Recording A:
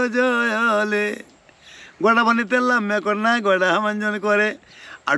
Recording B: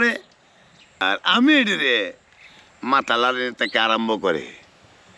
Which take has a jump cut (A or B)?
B